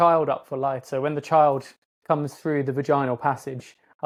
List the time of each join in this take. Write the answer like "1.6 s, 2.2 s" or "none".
none